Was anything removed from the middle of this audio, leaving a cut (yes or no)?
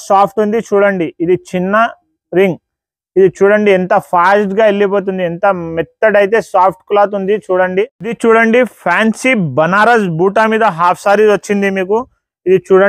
yes